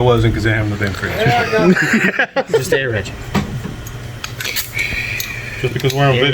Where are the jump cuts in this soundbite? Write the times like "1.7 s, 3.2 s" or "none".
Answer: 2.7 s

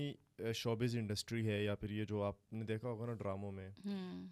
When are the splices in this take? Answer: none

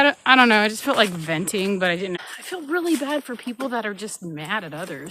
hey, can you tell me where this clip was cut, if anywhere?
2.2 s

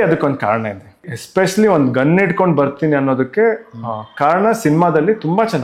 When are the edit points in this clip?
1.1 s

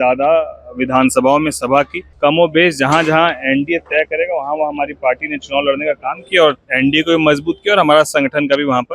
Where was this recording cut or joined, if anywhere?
2.0 s

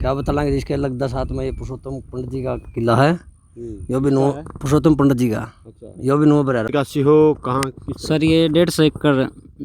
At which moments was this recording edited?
6.7 s

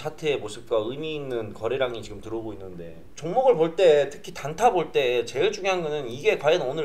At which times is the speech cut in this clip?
3.1 s

